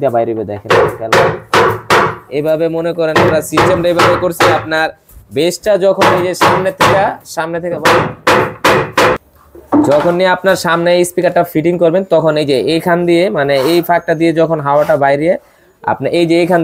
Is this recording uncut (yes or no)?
yes